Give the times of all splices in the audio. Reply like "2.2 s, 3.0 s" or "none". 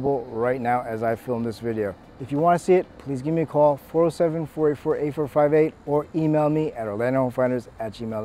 2.1 s